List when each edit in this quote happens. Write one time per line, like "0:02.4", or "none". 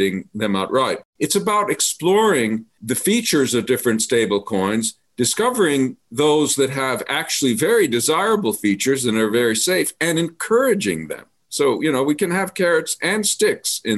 0:01.1